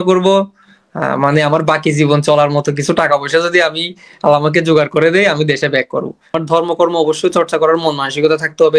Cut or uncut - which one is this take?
cut